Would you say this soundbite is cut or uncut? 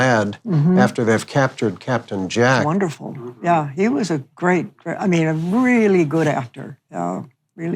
cut